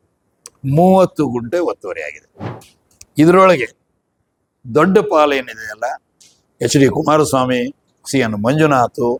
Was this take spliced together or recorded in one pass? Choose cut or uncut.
uncut